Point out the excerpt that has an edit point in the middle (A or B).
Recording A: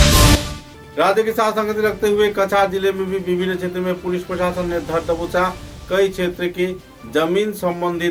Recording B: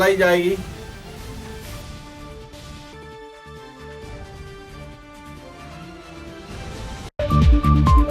B